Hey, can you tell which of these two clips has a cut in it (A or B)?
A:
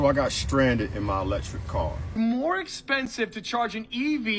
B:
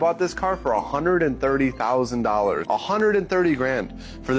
A